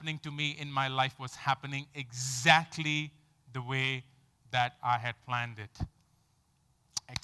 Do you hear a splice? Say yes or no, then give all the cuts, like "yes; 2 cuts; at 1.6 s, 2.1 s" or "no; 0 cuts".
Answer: no; 0 cuts